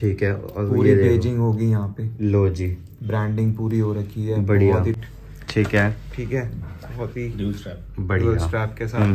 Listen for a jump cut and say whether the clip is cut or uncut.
cut